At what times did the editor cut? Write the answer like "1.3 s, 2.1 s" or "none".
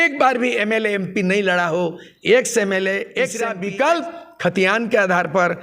3.5 s